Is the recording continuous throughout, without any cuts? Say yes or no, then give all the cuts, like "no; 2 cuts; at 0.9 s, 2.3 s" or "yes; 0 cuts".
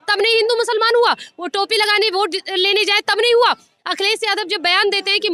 yes; 0 cuts